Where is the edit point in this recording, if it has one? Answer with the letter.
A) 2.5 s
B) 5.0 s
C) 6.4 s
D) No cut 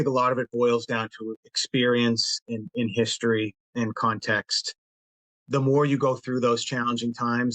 B